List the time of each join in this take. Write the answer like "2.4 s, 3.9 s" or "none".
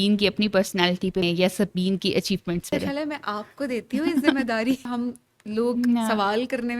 1.2 s, 2.7 s, 4.9 s